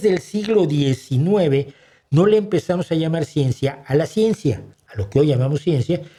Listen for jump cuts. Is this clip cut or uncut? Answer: uncut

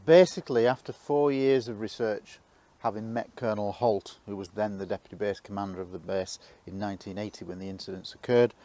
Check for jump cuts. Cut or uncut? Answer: cut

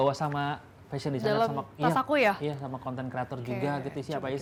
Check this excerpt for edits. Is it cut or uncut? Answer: uncut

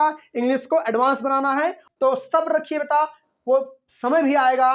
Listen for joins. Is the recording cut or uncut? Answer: cut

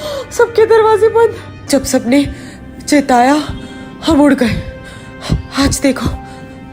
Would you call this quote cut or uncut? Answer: cut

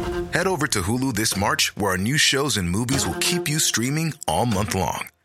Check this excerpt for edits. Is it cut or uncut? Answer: uncut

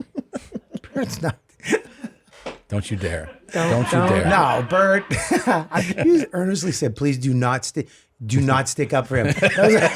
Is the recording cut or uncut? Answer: cut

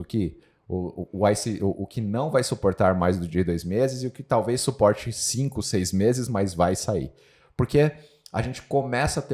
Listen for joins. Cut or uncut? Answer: uncut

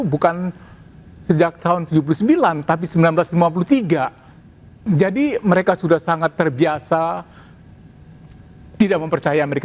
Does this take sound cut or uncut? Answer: uncut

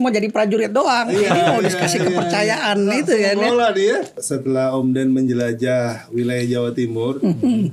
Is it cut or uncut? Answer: cut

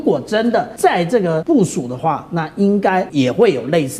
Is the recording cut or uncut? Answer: cut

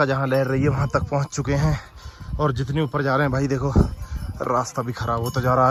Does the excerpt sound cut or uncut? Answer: uncut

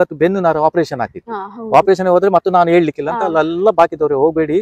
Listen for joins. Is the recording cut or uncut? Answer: uncut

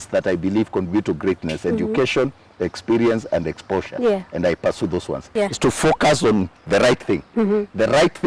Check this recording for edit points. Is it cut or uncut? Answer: cut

